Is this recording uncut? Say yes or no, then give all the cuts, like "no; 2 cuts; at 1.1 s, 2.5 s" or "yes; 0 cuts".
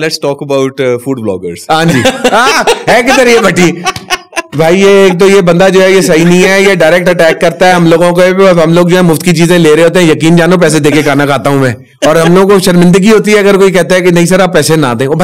yes; 0 cuts